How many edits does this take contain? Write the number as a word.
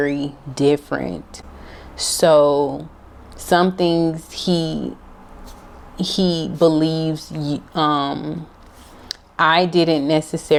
zero